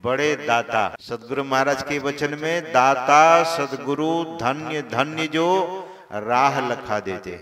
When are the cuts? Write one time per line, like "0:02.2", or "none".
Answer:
0:01.0